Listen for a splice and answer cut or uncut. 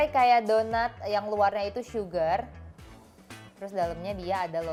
uncut